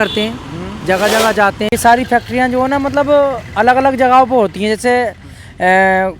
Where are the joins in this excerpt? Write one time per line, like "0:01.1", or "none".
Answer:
0:01.7